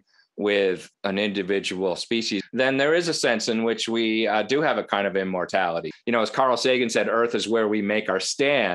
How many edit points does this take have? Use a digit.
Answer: 3